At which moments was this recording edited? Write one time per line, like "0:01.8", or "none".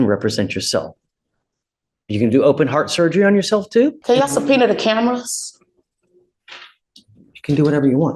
0:04.0